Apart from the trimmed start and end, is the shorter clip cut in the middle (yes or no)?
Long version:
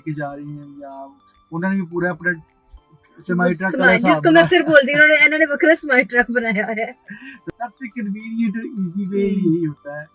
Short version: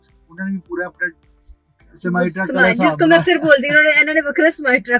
no